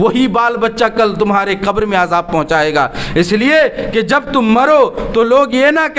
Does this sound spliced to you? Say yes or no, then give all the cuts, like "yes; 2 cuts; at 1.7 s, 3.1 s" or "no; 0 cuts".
no; 0 cuts